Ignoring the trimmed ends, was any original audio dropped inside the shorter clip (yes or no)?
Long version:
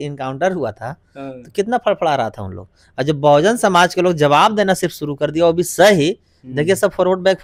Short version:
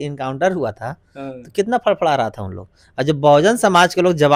no